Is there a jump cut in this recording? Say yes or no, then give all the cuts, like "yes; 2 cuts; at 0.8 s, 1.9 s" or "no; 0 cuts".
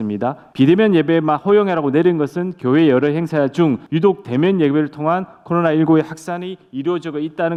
no; 0 cuts